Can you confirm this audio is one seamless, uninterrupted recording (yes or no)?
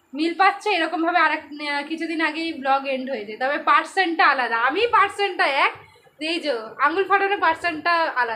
yes